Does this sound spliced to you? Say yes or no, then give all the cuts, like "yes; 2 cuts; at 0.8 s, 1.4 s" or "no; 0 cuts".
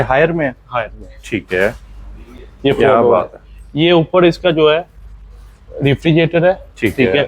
no; 0 cuts